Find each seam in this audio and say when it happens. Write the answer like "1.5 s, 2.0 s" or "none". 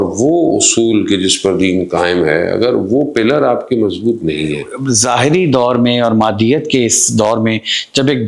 4.7 s